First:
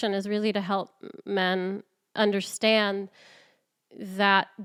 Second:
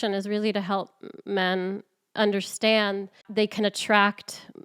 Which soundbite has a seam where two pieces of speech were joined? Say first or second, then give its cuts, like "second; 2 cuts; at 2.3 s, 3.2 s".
second; 1 cut; at 3.2 s